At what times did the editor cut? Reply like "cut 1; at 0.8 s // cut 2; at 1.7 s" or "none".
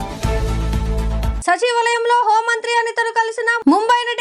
cut 1; at 1.4 s